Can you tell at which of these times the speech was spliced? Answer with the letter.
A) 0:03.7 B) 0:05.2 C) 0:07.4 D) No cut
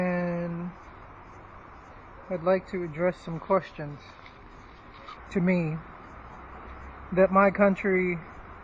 D